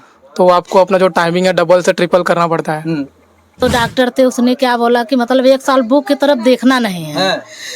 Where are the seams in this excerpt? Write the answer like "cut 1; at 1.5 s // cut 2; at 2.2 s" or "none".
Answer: cut 1; at 3.6 s